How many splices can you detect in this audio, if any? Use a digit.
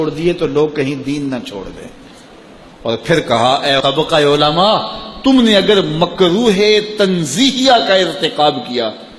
1